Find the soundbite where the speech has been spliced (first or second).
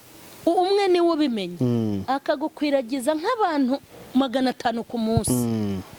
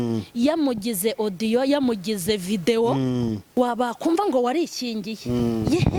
second